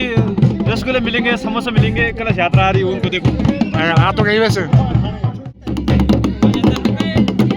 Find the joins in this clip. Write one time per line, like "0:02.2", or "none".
0:05.6